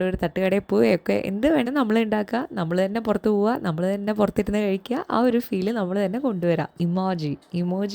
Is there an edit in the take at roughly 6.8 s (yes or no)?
yes